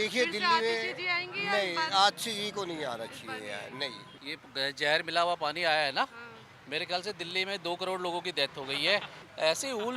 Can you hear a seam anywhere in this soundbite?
no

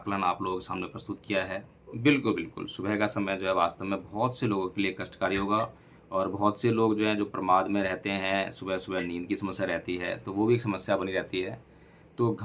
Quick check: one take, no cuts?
no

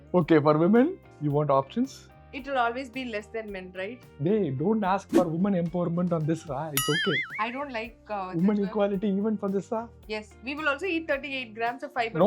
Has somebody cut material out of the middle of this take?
no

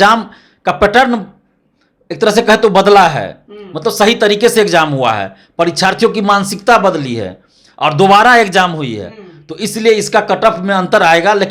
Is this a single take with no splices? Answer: yes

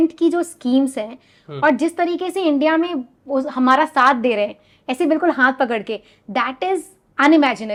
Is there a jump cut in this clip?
no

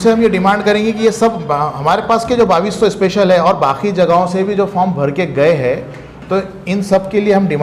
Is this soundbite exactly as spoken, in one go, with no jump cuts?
yes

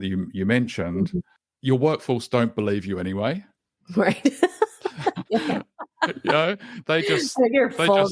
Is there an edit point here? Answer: yes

